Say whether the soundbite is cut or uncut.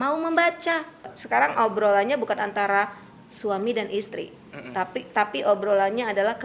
cut